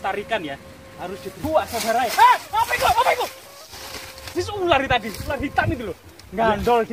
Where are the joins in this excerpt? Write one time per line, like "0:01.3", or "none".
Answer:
0:01.4

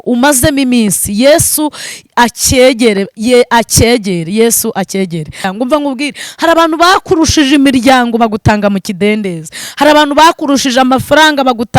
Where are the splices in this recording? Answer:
0:05.5

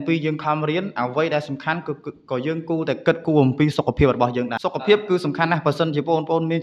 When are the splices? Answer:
0:04.6

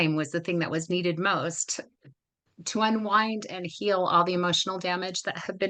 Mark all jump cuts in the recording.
none

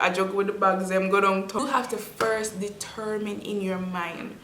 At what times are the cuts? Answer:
0:01.6

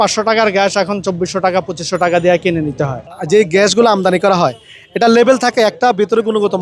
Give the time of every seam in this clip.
0:03.1

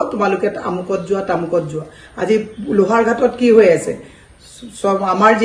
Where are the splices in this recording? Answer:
none

